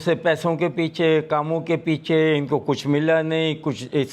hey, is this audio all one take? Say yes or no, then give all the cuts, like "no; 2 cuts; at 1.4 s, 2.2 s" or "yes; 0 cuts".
yes; 0 cuts